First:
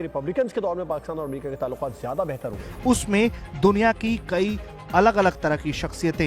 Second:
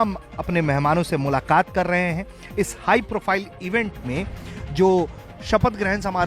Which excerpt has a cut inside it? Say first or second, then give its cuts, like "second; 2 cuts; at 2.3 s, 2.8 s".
first; 1 cut; at 2.7 s